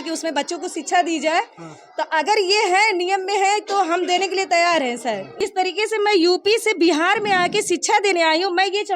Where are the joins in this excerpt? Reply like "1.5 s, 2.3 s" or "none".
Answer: 5.3 s